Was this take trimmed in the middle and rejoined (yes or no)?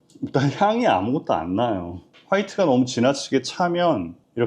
yes